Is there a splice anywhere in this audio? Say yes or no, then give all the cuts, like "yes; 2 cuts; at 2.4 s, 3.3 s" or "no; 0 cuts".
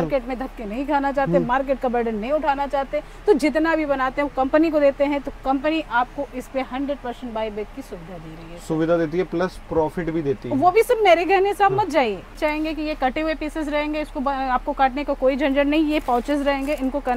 yes; 1 cut; at 12.4 s